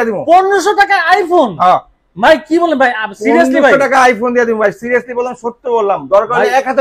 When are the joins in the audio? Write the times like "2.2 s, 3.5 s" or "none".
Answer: none